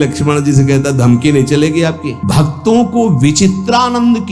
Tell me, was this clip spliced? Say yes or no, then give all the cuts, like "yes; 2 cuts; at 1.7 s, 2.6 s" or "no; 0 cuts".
yes; 1 cut; at 2.2 s